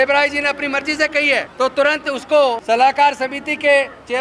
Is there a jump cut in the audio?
yes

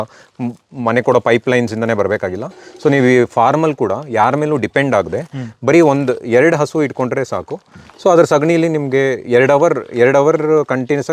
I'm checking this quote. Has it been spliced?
no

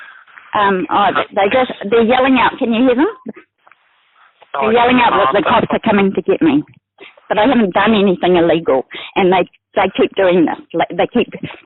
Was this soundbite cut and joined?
no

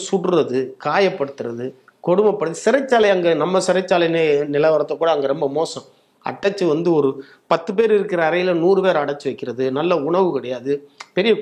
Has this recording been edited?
no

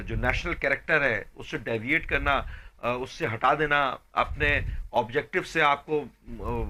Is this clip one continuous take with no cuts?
yes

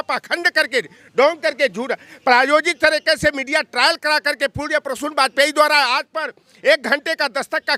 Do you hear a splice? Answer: no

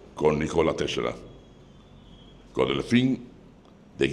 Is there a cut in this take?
no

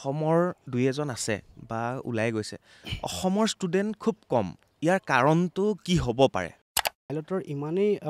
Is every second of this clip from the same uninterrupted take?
no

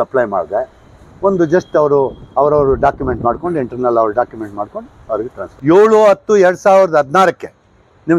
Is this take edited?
yes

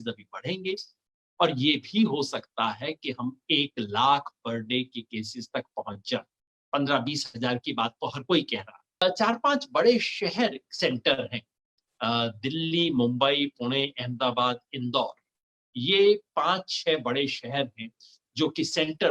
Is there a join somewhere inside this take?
yes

